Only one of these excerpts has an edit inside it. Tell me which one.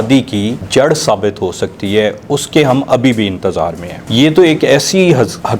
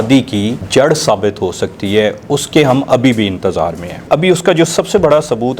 second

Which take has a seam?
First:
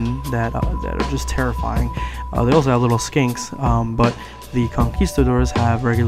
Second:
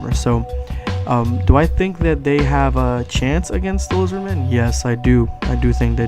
second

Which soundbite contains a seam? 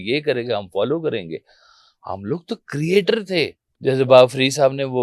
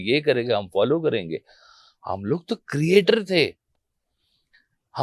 first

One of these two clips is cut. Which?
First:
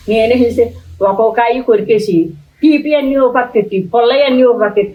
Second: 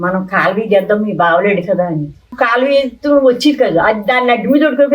second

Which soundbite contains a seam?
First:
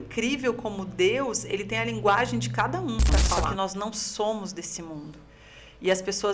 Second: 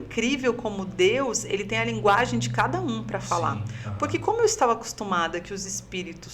first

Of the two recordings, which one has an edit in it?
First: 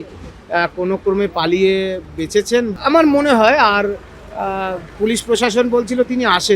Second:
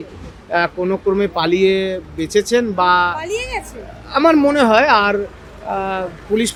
first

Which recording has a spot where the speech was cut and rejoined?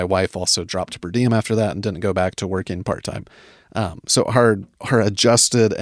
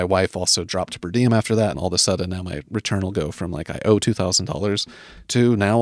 second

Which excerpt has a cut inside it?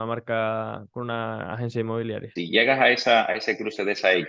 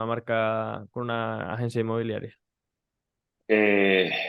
first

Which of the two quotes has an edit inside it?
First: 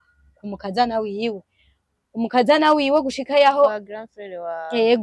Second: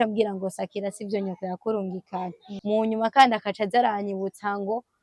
second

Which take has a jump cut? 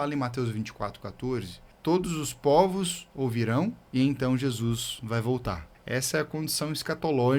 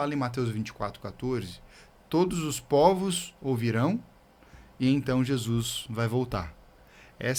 first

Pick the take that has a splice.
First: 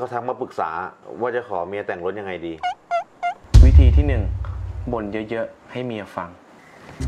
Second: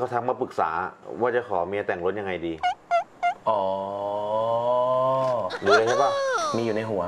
first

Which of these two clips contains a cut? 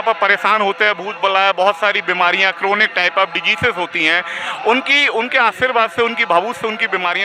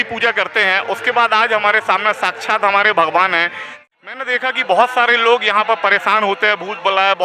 second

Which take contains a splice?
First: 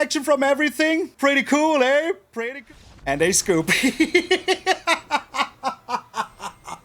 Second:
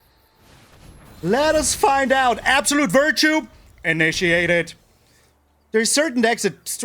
first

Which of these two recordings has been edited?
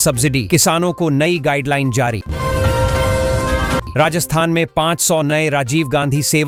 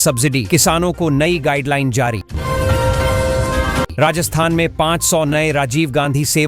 second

